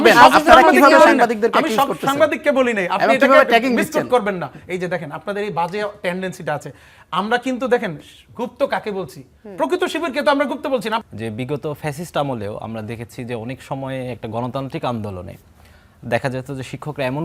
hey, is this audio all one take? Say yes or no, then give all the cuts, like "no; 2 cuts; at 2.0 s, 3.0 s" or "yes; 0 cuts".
no; 1 cut; at 11.0 s